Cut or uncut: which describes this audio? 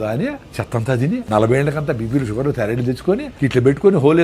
cut